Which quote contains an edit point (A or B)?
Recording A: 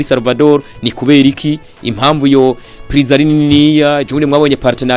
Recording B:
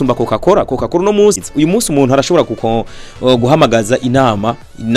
B